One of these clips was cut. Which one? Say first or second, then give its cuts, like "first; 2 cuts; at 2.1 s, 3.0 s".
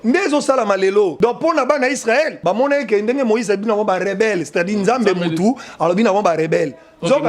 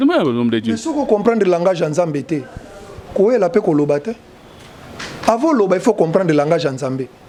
first; 2 cuts; at 1.1 s, 2.3 s